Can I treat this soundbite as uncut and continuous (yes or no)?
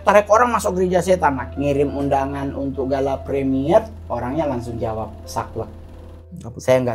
no